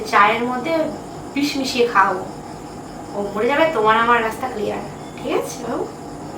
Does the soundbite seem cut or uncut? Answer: uncut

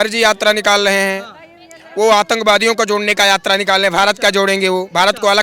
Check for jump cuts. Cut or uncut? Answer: uncut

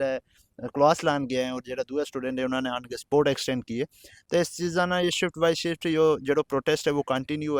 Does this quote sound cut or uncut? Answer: uncut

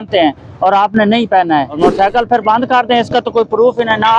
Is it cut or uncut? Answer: cut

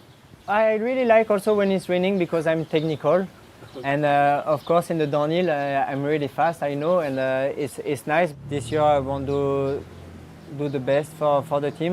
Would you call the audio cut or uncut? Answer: cut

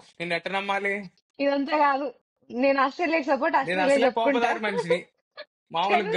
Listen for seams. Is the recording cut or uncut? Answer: cut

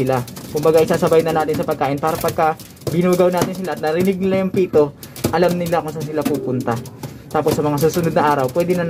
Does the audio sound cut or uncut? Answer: uncut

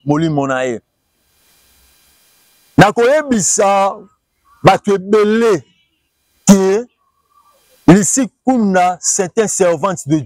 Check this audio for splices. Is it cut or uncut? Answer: uncut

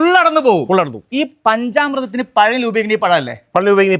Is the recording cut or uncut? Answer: cut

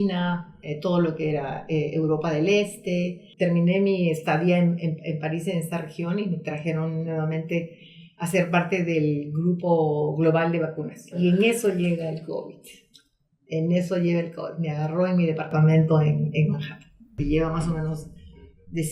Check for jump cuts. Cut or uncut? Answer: cut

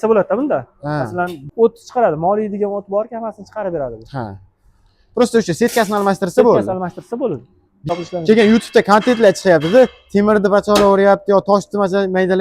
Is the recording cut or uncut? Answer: cut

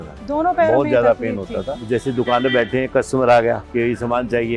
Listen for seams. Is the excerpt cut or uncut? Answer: cut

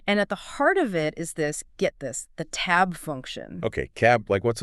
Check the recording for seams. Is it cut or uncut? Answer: uncut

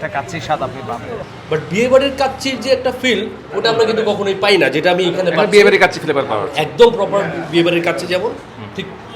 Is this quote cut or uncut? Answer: cut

